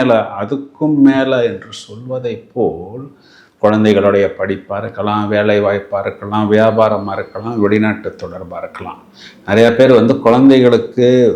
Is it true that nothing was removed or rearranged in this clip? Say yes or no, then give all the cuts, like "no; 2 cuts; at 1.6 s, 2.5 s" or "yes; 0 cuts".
yes; 0 cuts